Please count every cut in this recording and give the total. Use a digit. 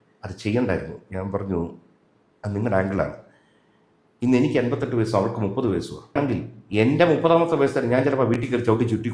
1